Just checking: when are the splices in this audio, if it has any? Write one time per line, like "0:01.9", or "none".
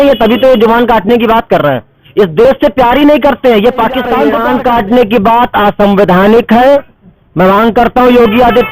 0:04.3